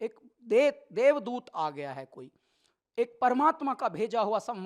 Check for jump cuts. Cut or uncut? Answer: uncut